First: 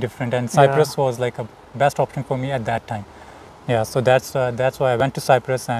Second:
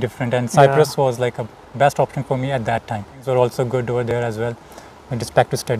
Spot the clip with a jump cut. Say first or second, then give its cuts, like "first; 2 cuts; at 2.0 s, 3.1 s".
second; 1 cut; at 3.1 s